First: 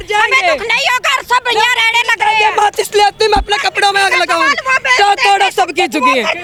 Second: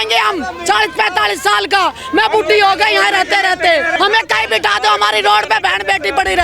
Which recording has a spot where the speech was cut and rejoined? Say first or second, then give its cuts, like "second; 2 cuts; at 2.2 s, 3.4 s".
second; 1 cut; at 3.9 s